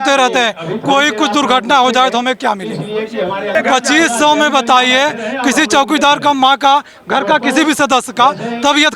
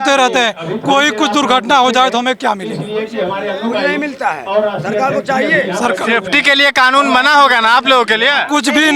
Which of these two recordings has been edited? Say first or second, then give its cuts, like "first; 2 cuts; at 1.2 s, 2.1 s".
first; 1 cut; at 3.5 s